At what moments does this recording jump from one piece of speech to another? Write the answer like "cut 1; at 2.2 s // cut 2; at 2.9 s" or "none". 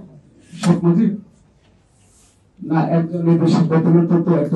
none